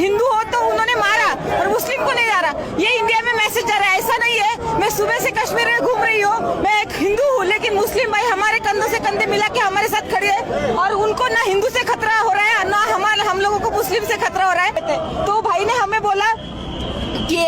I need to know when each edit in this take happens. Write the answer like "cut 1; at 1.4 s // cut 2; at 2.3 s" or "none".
cut 1; at 14.8 s